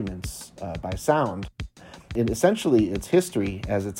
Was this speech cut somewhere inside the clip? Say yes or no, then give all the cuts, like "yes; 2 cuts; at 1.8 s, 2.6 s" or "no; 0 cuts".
yes; 1 cut; at 2.1 s